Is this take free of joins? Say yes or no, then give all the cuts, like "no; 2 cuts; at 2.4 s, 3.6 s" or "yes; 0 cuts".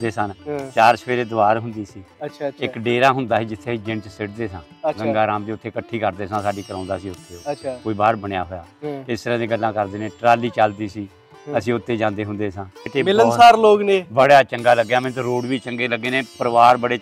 no; 1 cut; at 12.9 s